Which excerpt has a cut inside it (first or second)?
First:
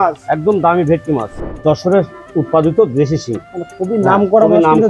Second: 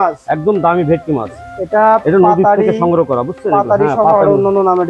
first